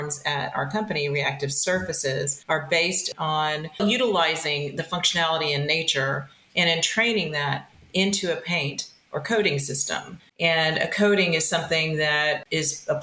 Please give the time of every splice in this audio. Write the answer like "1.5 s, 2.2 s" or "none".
2.4 s, 3.8 s, 10.2 s